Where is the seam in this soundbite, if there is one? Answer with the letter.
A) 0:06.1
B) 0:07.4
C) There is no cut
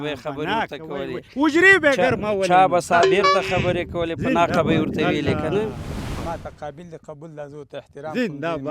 A